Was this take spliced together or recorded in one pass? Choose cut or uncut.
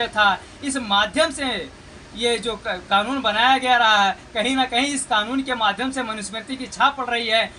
uncut